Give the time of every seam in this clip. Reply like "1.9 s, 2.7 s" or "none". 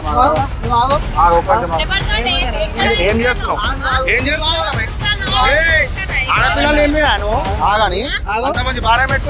none